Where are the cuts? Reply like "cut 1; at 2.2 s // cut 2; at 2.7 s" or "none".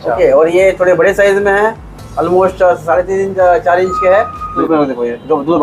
cut 1; at 4.6 s